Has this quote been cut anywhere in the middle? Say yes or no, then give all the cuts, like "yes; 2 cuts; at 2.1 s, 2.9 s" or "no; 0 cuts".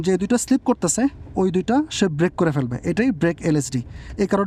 no; 0 cuts